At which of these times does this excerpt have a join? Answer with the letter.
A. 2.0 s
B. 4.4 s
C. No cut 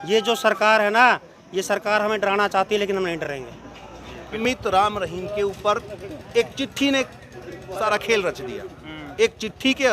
B